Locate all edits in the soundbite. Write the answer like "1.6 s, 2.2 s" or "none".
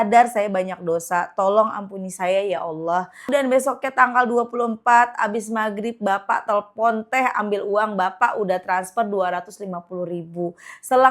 3.3 s